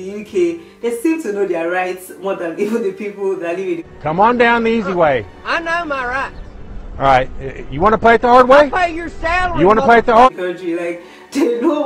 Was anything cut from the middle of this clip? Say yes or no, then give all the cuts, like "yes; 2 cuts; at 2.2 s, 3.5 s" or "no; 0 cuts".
no; 0 cuts